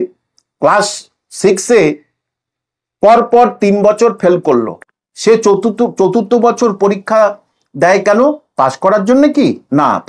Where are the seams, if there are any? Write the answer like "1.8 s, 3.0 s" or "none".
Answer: none

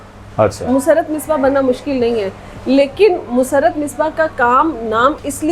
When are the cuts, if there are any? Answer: none

